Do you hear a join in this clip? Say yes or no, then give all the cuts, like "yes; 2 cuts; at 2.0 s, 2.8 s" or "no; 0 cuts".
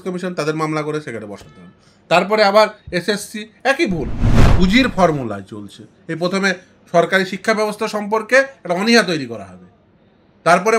yes; 1 cut; at 4.5 s